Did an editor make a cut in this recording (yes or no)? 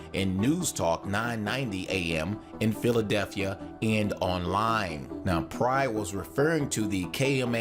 yes